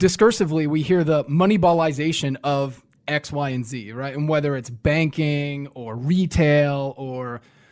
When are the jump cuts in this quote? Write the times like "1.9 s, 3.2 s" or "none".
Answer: none